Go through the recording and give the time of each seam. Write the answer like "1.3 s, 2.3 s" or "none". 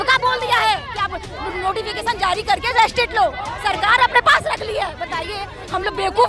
none